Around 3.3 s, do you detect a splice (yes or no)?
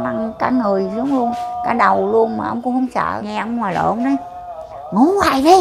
yes